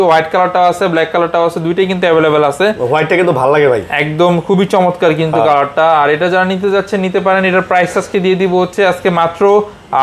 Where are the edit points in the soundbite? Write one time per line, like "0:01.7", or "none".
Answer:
none